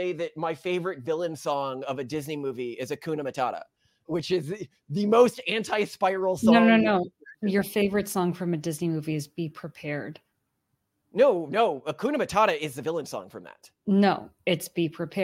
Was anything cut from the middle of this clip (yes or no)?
no